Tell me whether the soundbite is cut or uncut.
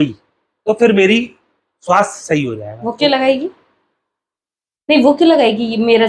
uncut